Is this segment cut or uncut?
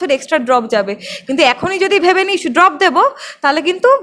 uncut